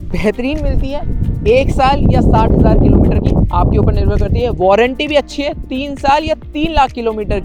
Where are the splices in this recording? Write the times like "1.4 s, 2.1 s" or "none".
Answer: none